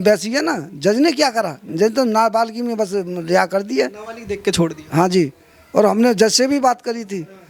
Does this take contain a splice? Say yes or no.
no